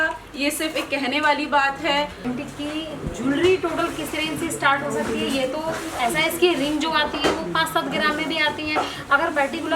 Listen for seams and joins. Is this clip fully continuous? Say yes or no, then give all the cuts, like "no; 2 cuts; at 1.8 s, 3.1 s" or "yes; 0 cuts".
no; 1 cut; at 2.2 s